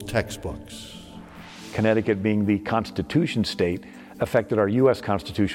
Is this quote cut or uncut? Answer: cut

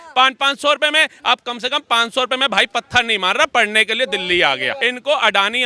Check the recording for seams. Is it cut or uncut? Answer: cut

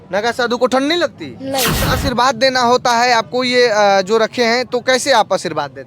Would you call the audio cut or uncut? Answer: cut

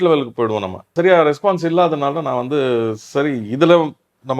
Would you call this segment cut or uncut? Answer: cut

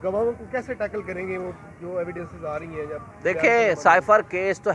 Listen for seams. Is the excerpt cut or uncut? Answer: uncut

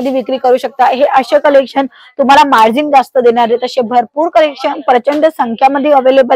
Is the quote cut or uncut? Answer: uncut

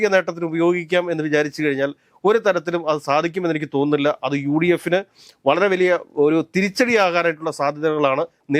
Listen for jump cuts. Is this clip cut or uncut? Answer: uncut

